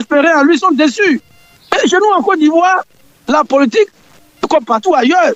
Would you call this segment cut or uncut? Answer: uncut